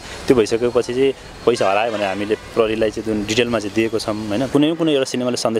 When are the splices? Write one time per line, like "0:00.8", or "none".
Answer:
0:04.5